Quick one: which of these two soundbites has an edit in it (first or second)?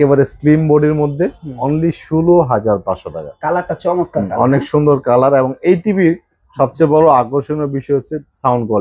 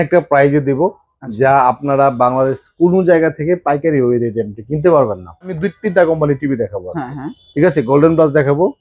second